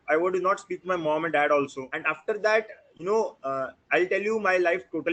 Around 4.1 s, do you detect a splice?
no; 1 cut; at 1.8 s

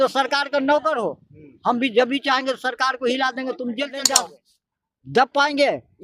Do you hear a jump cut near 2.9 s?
no; 1 cut; at 4.2 s

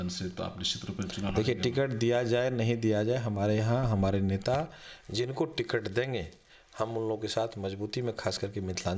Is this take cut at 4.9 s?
no; 0 cuts

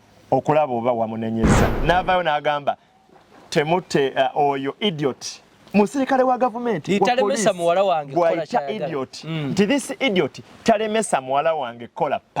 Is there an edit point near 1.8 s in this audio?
yes; 1 cut; at 1.8 s

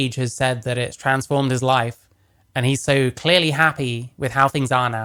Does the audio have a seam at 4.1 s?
no; 0 cuts

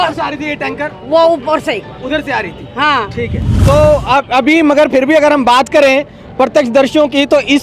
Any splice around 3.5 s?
yes; 1 cut; at 3.5 s

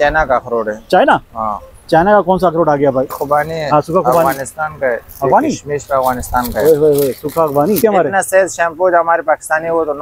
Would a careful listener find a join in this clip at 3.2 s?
yes; 2 cuts; at 3.2 s, 7.8 s

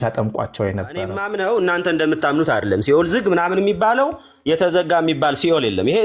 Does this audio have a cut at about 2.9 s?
no; 1 cut; at 1.2 s

